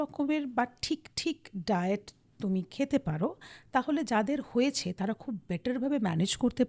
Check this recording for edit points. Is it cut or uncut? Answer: uncut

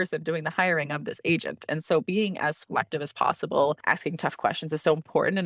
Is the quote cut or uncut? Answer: cut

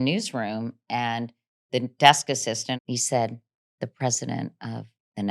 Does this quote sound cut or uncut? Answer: cut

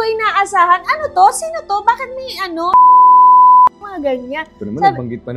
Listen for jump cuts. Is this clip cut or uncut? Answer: uncut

